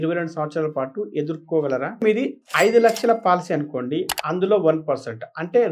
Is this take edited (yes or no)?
yes